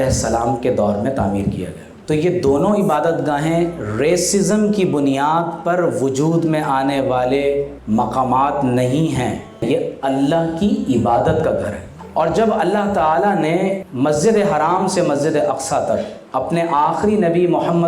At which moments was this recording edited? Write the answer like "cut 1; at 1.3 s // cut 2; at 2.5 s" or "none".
cut 1; at 1.9 s // cut 2; at 9.5 s // cut 3; at 13.9 s // cut 4; at 16.2 s